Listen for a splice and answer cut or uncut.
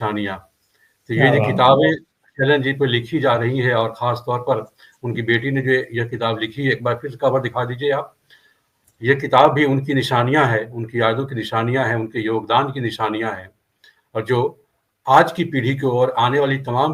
uncut